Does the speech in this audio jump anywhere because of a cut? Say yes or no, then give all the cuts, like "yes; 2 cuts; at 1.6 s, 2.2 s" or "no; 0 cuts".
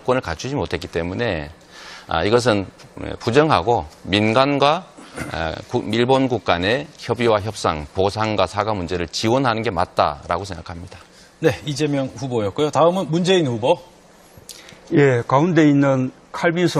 yes; 1 cut; at 11.7 s